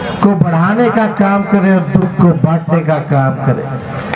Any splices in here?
no; 0 cuts

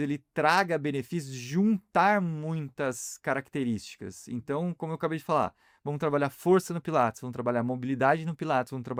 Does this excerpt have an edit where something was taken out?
no; 0 cuts

